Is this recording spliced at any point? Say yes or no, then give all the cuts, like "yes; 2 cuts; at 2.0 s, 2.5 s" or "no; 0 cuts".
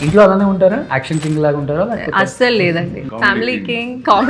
yes; 2 cuts; at 0.9 s, 3.1 s